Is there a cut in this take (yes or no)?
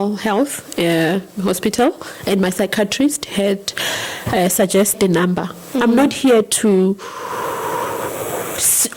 yes